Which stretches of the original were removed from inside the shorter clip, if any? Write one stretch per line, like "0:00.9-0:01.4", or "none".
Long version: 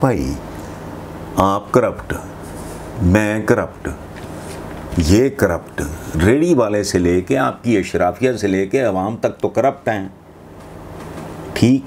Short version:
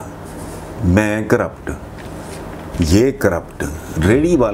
none

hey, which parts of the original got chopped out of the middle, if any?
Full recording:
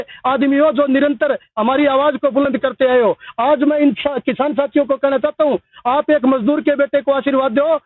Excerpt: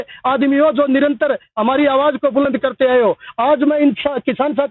none

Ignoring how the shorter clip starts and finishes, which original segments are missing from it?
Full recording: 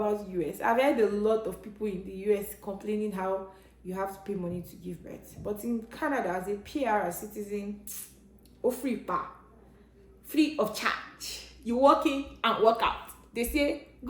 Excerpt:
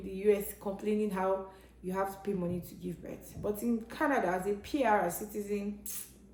none

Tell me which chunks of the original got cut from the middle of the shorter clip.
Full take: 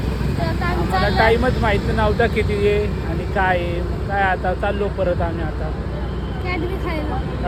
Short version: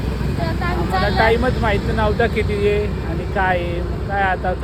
none

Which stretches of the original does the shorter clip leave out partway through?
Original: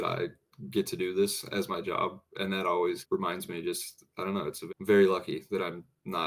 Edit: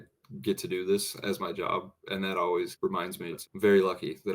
0:03.6-0:04.6

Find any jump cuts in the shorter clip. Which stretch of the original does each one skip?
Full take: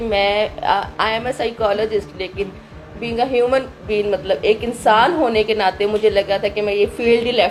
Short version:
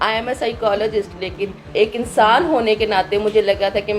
0:02.7-0:04.4

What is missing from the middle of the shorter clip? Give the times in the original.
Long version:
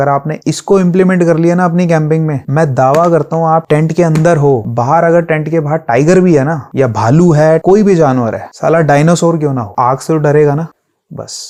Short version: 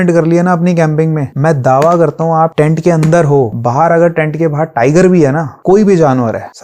0:06.7-0:07.6

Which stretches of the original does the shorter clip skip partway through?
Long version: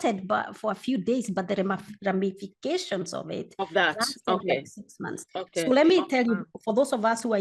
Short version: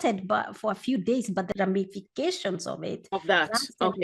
0:01.5-0:02.0

